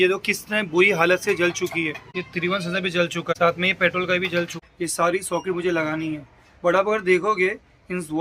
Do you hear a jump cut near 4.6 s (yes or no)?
yes